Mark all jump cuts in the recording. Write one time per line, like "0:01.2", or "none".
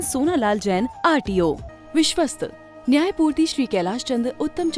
0:01.7